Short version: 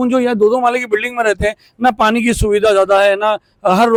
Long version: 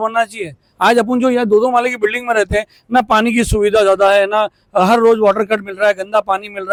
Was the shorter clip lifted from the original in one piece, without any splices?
yes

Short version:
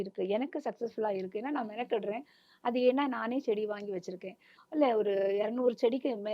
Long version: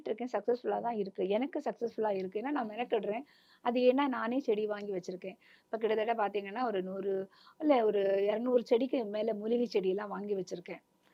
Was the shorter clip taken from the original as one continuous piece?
no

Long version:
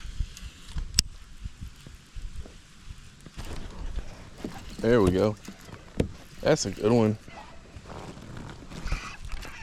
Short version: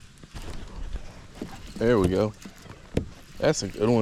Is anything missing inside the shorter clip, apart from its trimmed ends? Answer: no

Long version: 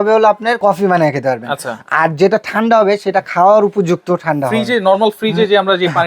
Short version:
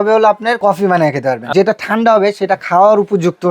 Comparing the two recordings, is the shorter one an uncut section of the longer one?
no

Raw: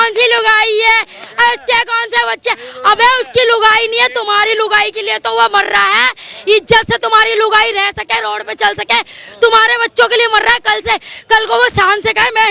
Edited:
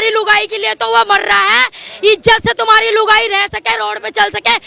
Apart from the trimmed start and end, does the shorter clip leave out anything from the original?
no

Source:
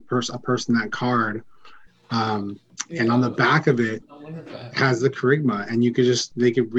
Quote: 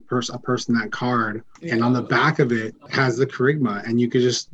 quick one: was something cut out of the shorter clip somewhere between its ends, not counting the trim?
yes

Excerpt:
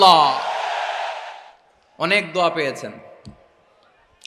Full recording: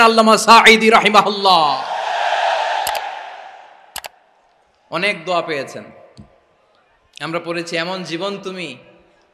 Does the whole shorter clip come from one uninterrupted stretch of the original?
no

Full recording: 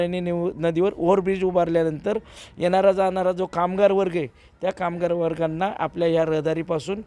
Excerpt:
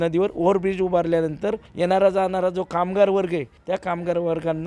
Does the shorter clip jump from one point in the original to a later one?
yes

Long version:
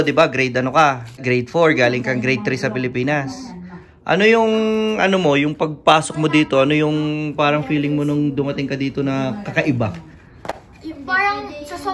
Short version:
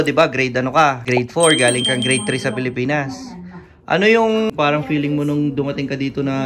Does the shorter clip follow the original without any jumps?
no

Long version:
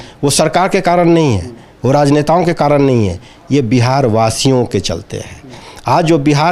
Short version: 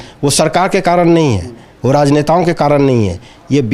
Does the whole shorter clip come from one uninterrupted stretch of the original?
yes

